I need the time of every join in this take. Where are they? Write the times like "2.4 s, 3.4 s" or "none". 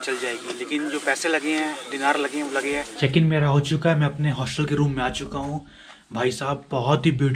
2.9 s